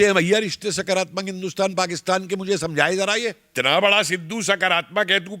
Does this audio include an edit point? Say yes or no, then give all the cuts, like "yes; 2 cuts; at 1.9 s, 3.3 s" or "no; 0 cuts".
yes; 1 cut; at 3.4 s